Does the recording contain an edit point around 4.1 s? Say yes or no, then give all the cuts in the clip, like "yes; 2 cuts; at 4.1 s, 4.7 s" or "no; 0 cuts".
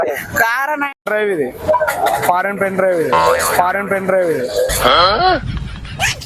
no; 1 cut; at 1.0 s